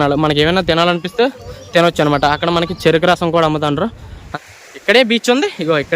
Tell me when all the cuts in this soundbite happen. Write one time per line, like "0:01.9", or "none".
0:04.3

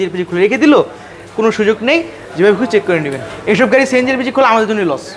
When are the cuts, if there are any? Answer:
0:03.3

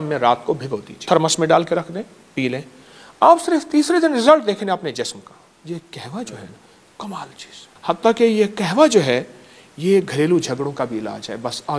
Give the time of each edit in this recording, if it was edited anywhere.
0:01.0
0:05.6
0:07.6

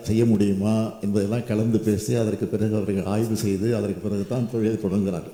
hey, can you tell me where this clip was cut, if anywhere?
none

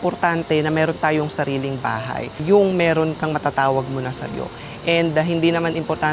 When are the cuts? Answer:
0:02.4

